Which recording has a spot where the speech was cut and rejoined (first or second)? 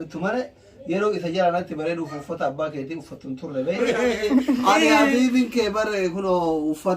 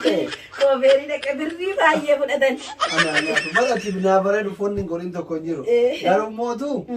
first